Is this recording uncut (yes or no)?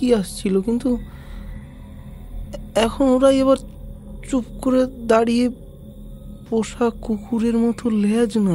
yes